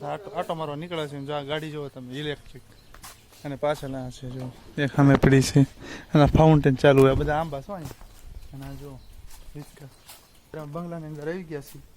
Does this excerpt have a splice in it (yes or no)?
yes